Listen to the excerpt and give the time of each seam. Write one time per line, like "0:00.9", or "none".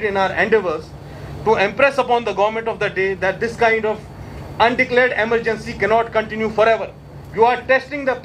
none